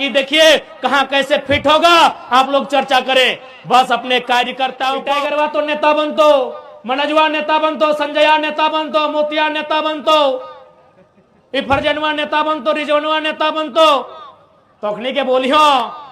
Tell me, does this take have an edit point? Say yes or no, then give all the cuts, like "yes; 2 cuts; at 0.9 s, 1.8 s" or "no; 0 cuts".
yes; 1 cut; at 5.1 s